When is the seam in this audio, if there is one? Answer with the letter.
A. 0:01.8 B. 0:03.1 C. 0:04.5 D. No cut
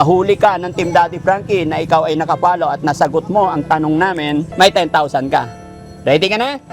C